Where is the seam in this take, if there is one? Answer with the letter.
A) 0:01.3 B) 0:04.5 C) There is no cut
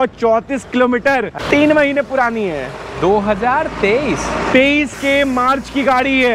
A